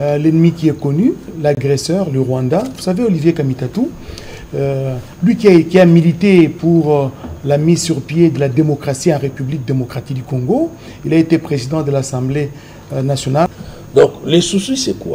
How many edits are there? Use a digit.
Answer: 1